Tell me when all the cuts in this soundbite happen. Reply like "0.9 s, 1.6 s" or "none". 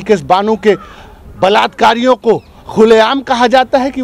none